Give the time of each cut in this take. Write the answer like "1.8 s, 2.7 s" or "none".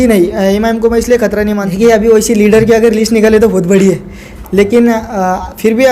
1.7 s

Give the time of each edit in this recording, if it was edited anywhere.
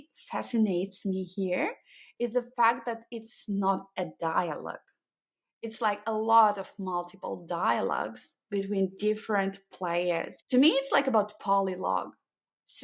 10.3 s

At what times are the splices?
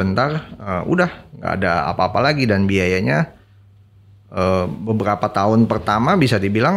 none

